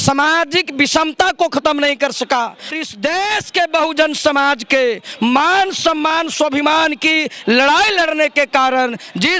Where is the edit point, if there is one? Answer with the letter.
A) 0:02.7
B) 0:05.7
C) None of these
A